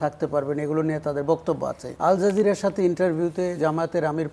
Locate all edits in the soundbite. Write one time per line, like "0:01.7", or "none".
0:01.8

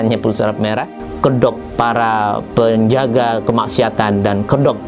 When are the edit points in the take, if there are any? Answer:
0:01.0

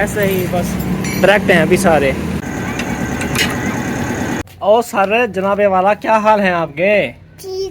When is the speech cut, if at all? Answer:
0:02.4
0:04.4

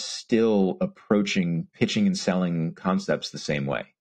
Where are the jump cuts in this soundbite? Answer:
0:01.7

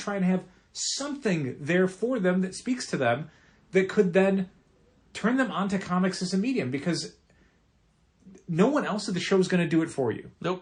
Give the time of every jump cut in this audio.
none

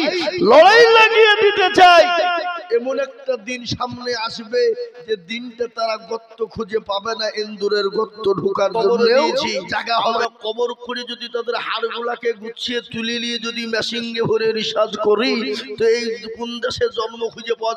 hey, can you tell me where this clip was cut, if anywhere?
0:10.2

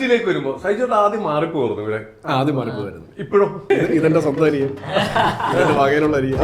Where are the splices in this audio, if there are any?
0:03.6

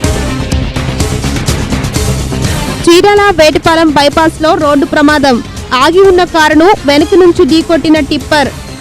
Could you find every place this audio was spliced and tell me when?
none

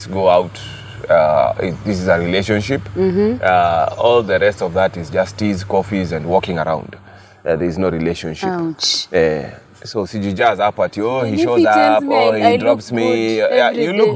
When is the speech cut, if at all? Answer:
none

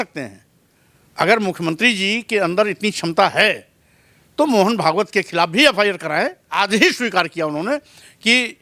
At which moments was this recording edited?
0:06.4

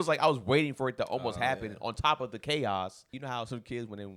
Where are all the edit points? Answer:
0:03.2

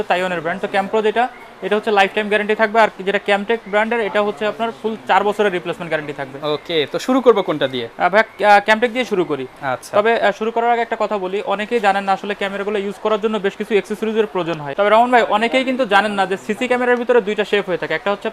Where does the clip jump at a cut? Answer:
none

